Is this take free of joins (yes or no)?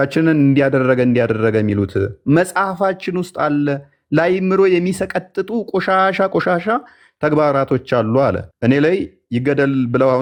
yes